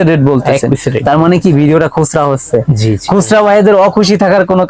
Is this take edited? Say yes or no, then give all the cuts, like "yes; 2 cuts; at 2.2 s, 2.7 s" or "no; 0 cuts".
no; 0 cuts